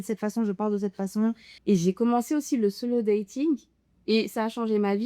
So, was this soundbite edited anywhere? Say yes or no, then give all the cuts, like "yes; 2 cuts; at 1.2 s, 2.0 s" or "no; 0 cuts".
yes; 1 cut; at 1.5 s